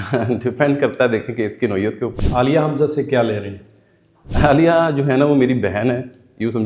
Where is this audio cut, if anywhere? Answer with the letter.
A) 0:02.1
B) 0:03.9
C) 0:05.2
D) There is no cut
A